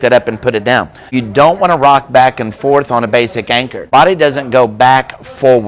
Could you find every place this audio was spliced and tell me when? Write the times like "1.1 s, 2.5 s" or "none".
1.1 s, 3.9 s